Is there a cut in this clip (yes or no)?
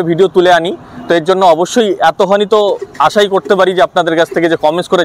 no